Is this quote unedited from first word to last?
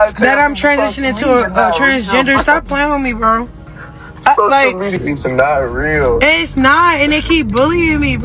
yes; 0 cuts

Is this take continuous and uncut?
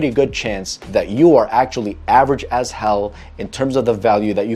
yes; 0 cuts

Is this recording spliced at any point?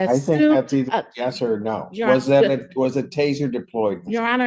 no; 0 cuts

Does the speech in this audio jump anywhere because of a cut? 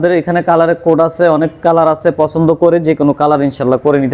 no; 0 cuts

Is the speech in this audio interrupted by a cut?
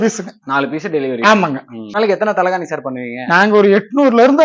yes; 1 cut; at 2.0 s

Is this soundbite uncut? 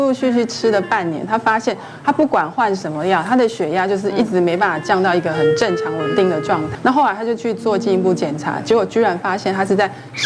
no; 1 cut; at 6.7 s

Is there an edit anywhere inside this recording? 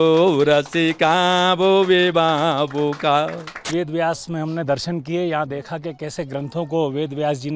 yes; 1 cut; at 3.7 s

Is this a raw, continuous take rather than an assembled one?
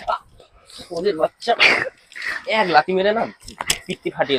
yes; 0 cuts

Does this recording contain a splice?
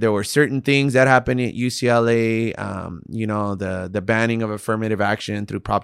no; 0 cuts

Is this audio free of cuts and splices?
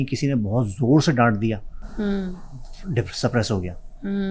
yes; 0 cuts

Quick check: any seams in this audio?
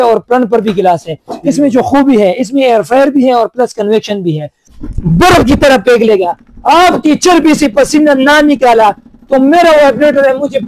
yes; 1 cut; at 4.6 s

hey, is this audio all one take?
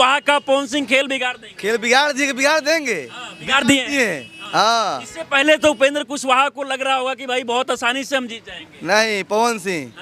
yes; 0 cuts

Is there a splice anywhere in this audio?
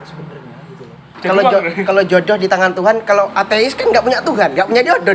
yes; 1 cut; at 1.1 s

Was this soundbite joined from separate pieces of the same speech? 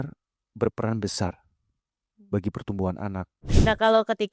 yes; 1 cut; at 3.4 s

